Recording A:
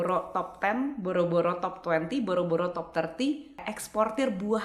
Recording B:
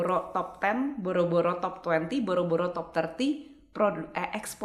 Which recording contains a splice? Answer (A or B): A